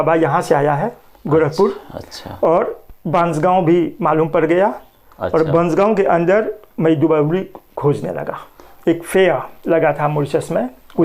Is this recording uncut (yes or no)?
no